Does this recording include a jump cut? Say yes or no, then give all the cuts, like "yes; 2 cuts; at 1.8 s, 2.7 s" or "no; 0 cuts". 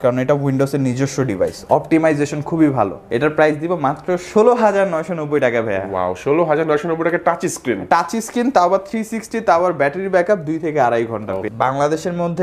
yes; 2 cuts; at 3.0 s, 11.5 s